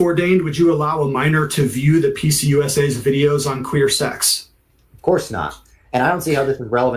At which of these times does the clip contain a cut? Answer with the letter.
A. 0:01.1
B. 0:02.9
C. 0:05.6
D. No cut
D